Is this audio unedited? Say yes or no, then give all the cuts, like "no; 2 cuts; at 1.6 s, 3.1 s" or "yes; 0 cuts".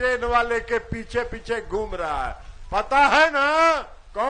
yes; 0 cuts